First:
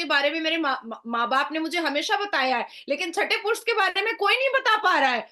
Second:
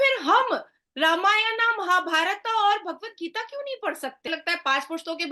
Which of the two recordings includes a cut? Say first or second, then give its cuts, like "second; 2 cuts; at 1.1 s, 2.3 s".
second; 1 cut; at 4.3 s